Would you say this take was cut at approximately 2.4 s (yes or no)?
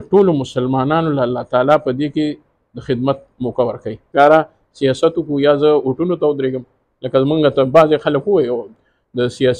no